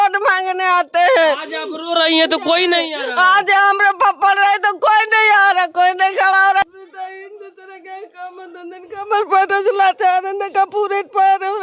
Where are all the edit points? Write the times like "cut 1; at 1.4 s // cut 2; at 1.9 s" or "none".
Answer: cut 1; at 6.6 s